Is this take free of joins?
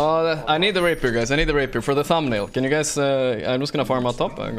yes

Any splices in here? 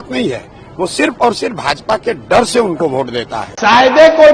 yes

